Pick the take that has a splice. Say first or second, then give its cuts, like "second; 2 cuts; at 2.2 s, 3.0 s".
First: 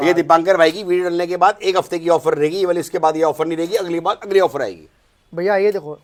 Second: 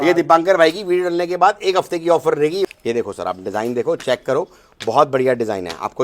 second; 1 cut; at 2.7 s